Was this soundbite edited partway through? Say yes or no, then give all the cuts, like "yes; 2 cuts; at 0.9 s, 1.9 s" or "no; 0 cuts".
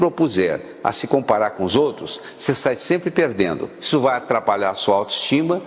yes; 1 cut; at 3.7 s